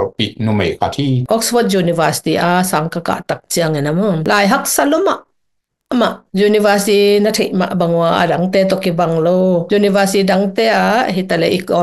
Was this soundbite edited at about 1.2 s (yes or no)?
yes